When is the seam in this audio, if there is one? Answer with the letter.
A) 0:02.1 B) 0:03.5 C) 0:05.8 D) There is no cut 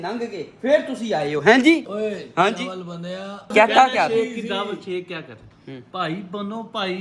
B